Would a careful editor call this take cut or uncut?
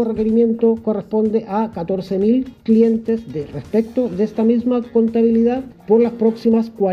cut